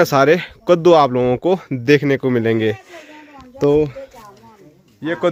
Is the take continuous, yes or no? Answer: yes